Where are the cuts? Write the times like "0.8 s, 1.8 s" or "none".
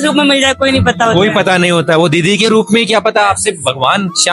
none

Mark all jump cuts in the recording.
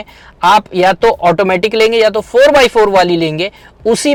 none

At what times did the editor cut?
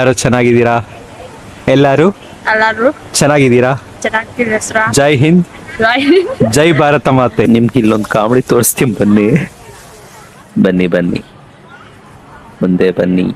7.4 s

